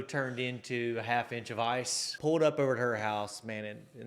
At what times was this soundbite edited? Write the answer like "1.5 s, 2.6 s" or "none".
2.1 s